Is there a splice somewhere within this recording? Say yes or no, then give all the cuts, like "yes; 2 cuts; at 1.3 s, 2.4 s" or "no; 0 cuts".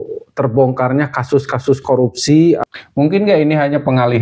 yes; 1 cut; at 2.7 s